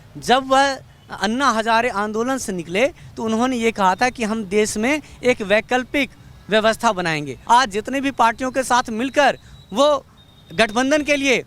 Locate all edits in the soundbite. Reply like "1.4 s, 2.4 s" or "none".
7.3 s

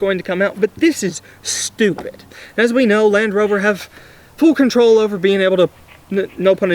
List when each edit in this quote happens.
2.2 s

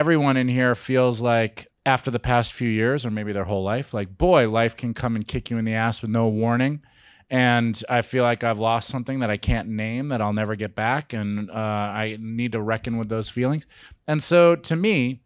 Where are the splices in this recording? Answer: 1.6 s

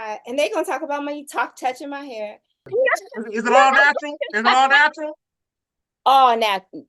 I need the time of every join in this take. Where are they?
2.6 s

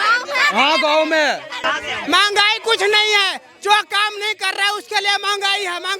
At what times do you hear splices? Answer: 1.7 s

